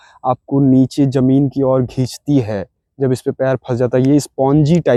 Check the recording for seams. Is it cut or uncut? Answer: uncut